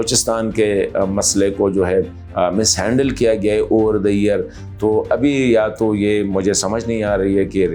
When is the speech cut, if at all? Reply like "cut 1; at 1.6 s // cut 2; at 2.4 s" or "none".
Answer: none